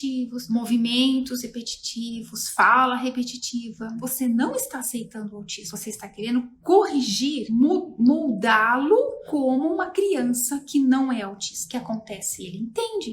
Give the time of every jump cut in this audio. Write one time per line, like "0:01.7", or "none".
0:04.0
0:07.4